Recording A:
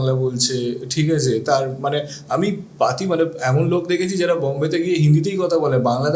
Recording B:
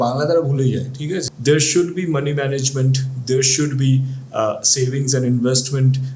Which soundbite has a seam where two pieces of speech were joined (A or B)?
B